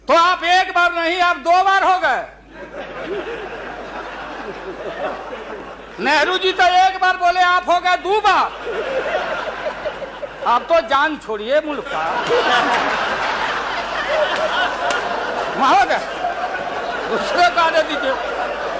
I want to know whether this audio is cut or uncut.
uncut